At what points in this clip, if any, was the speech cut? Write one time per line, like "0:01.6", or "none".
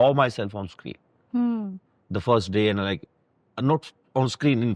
none